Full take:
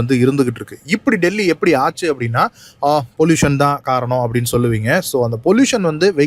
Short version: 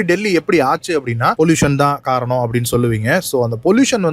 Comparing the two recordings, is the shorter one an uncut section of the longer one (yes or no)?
no